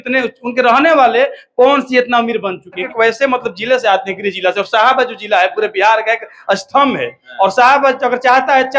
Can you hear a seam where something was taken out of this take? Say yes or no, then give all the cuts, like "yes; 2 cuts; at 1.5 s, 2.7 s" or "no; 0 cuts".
yes; 1 cut; at 2.9 s